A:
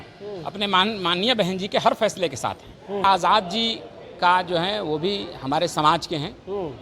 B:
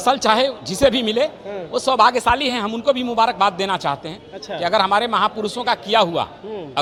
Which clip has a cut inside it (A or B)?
A